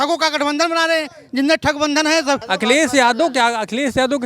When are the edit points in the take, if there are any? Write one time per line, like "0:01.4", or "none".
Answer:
0:02.5